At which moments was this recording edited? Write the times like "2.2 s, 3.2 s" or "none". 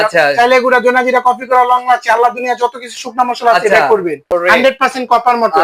4.2 s

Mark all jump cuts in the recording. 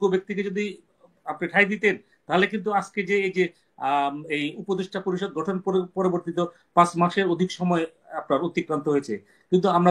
none

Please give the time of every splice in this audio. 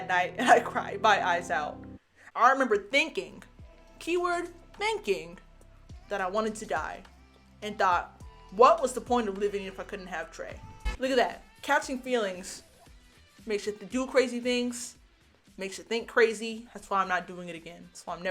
1.8 s, 10.7 s

